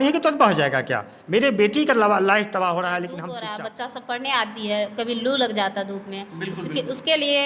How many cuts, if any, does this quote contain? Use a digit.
1